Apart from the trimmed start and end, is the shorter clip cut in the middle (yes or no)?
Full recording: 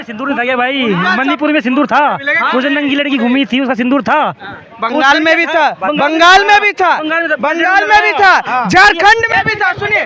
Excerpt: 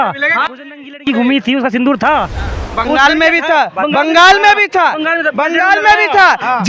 no